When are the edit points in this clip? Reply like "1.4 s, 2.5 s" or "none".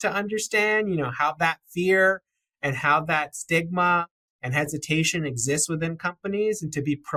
none